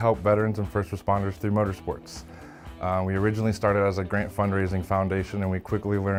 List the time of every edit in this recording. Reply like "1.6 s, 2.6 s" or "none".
none